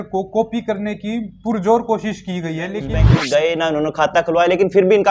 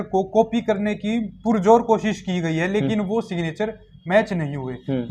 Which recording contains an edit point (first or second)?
first